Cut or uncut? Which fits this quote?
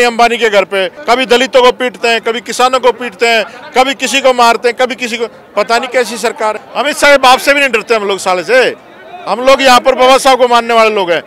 cut